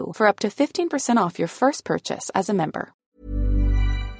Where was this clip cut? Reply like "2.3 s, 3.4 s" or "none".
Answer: 3.0 s